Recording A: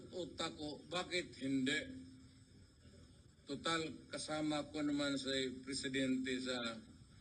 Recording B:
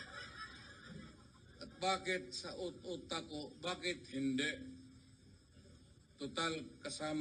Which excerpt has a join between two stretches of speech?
B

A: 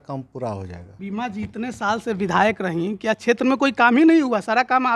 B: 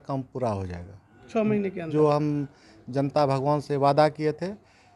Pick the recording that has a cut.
A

